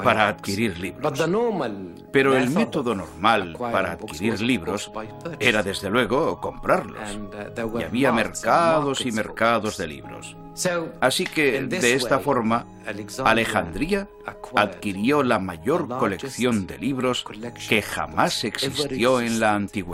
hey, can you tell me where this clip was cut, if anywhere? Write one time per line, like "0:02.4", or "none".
0:07.4